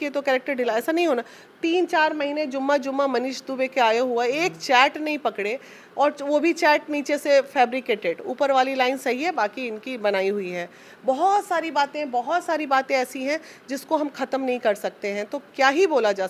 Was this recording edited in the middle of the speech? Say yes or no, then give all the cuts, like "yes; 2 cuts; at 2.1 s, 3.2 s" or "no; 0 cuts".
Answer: no; 0 cuts